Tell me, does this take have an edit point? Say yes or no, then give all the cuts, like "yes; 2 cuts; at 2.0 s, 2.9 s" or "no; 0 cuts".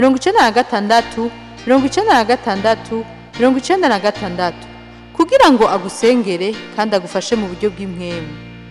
no; 0 cuts